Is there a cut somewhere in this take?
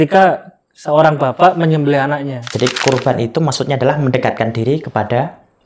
yes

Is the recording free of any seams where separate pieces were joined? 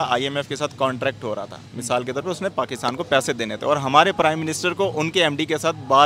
yes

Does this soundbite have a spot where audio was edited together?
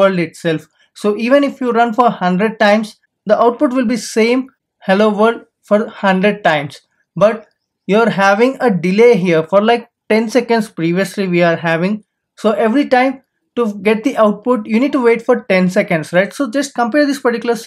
no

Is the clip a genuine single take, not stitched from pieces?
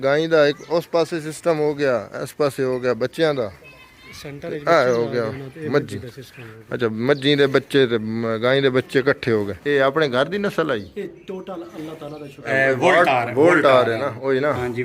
no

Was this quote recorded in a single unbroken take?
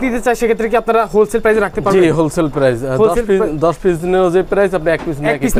yes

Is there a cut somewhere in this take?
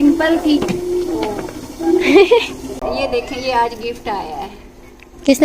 yes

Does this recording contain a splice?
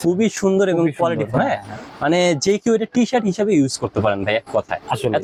no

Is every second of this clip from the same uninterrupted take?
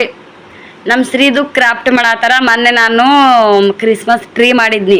yes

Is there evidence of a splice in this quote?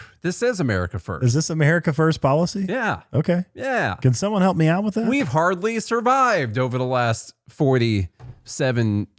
no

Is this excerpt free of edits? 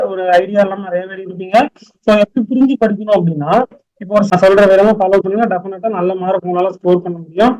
no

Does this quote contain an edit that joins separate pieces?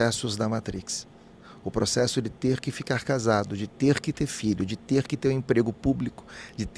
no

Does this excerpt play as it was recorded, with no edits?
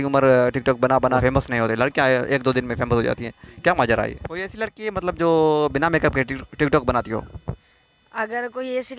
no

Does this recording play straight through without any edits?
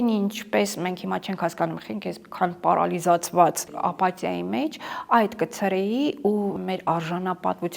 no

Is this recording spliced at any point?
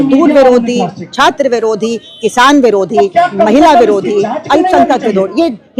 no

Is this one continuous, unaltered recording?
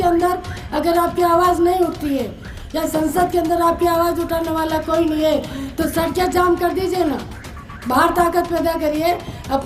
yes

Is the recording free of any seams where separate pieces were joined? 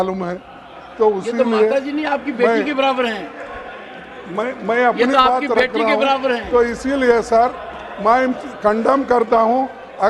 yes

